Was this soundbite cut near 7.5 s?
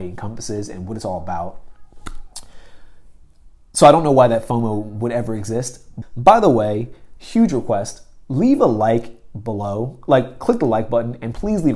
no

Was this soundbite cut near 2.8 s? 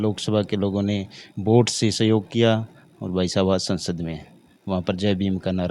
no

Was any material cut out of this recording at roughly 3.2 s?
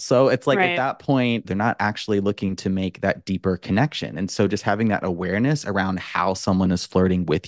no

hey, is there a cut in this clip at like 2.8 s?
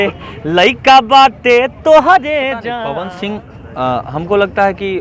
yes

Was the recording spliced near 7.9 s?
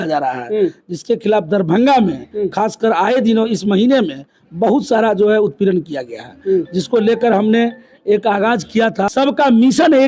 no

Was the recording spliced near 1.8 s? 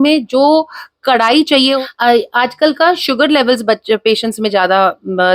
yes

